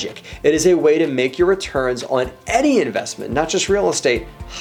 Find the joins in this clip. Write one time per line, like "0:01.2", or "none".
none